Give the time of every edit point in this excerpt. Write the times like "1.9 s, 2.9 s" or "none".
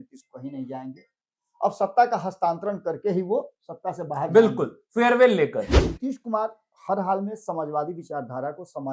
5.7 s